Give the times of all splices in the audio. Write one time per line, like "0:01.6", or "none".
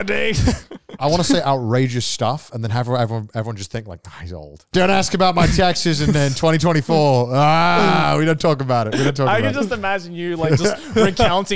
0:01.0
0:04.7